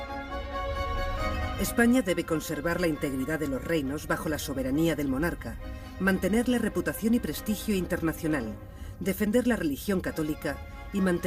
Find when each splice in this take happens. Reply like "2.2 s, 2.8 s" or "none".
3.1 s